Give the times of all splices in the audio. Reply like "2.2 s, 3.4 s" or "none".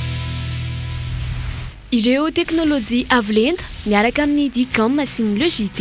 none